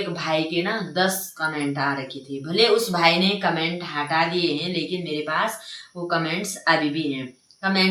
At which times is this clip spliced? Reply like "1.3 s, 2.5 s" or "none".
none